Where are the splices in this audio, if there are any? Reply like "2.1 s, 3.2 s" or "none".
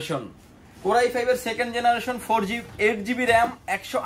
none

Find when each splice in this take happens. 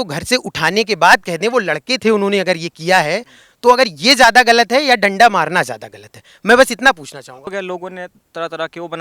7.5 s

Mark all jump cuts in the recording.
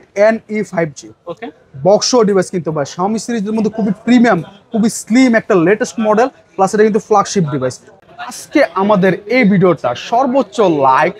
7.9 s

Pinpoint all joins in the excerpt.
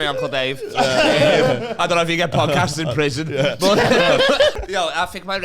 4.5 s

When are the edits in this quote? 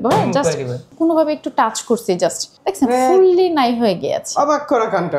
0.9 s, 2.5 s

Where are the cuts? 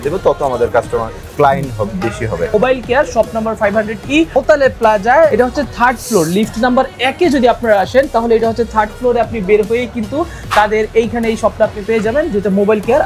2.5 s, 4.4 s, 5.3 s

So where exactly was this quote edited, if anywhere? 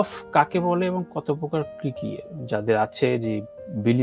none

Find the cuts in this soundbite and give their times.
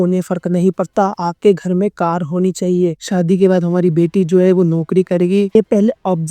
3.0 s, 5.5 s

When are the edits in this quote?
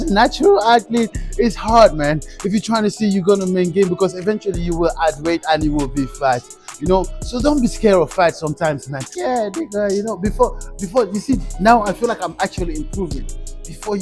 9.1 s

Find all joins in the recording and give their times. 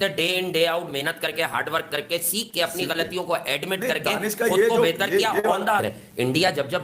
5.8 s

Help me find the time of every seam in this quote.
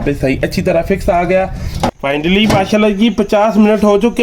1.9 s

